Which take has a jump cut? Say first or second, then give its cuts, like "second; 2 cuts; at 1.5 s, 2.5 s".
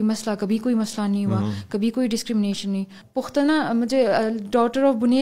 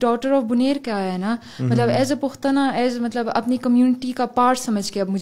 first; 1 cut; at 3.0 s